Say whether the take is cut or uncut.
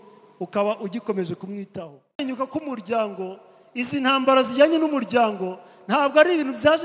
cut